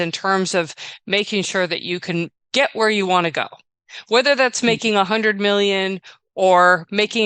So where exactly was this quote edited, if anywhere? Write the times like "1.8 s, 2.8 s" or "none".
2.4 s

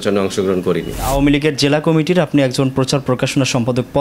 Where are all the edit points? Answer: 1.1 s

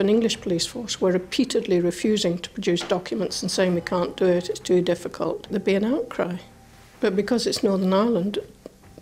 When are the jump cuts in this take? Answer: 5.5 s

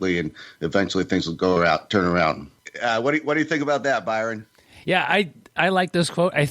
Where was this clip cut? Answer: 2.5 s

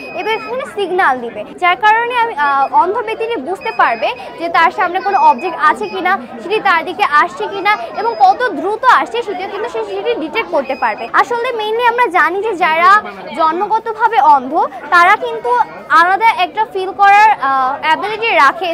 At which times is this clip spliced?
1.4 s, 11.0 s

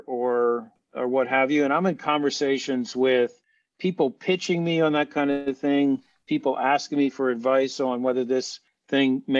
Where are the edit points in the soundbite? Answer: none

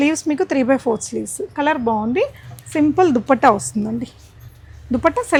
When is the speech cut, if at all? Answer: none

